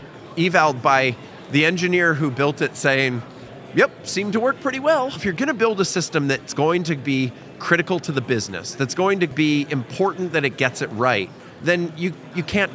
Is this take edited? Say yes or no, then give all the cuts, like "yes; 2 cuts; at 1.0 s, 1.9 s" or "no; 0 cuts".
yes; 2 cuts; at 5.2 s, 9.3 s